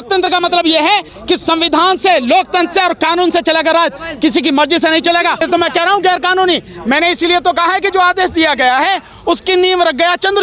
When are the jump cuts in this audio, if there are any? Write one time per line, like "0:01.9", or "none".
0:05.4